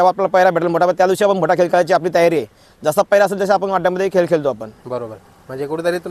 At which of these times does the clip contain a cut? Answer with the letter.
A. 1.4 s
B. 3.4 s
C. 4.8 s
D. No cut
D